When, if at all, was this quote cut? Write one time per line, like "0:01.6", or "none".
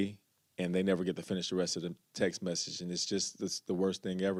none